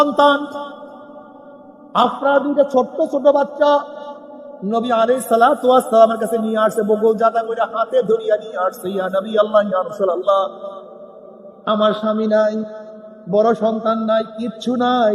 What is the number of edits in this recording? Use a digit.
0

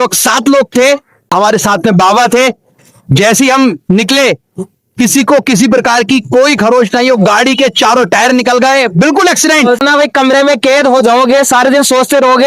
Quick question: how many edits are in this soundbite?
2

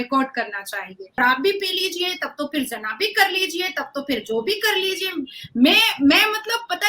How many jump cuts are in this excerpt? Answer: 1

